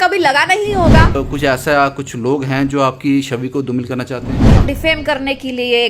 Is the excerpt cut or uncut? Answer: cut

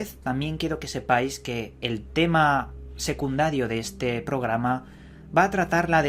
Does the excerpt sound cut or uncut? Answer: cut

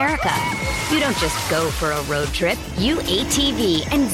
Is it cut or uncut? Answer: uncut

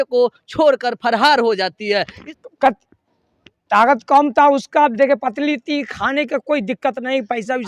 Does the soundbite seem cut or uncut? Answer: cut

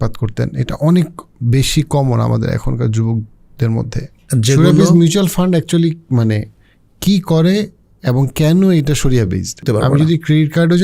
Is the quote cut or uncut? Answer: cut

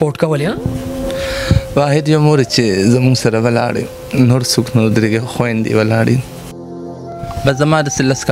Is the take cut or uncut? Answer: cut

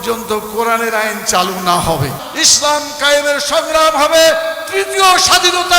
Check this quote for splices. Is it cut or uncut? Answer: cut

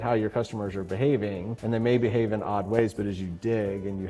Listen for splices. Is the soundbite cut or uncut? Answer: cut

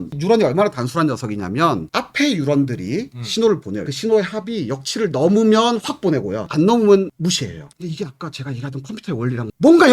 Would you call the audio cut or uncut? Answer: cut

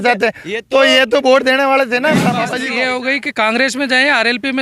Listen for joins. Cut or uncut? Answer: cut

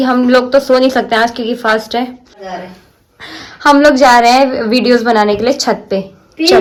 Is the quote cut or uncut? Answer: uncut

